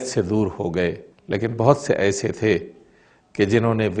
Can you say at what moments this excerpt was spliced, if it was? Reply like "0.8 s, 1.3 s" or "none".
1.1 s